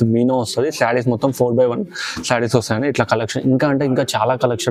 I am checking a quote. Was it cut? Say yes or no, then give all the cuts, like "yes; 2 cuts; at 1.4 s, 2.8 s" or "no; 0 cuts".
no; 0 cuts